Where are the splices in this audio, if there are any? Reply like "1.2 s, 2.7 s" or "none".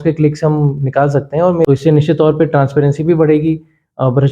1.7 s